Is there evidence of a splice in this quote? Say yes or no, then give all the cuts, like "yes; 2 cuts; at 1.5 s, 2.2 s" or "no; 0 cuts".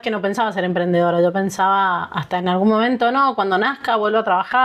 no; 0 cuts